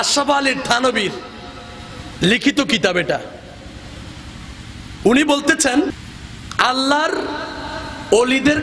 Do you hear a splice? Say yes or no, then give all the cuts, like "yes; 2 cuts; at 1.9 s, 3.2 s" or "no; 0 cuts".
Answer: yes; 1 cut; at 5.9 s